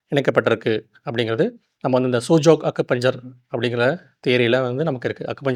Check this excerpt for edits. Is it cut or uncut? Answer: uncut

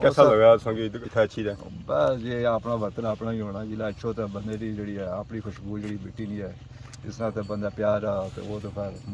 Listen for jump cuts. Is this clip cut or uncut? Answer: cut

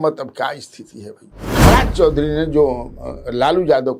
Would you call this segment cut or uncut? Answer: cut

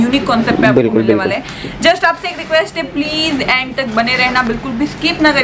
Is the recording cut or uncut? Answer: uncut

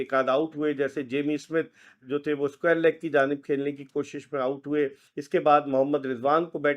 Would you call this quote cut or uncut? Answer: cut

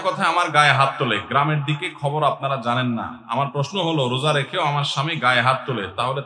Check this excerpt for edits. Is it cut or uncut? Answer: uncut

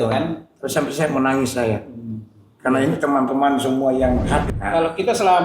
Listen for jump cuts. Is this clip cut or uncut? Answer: cut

